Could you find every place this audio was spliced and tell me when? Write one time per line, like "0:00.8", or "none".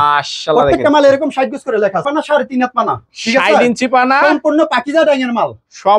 0:02.0